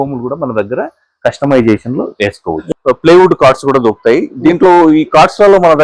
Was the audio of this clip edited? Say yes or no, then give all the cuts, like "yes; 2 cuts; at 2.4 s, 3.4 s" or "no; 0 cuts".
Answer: yes; 1 cut; at 2.6 s